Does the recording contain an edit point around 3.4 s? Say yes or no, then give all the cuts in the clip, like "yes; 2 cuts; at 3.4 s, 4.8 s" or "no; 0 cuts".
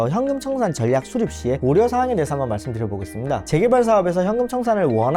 yes; 1 cut; at 3.4 s